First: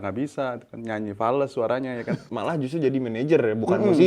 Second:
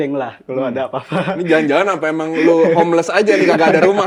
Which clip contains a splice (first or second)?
first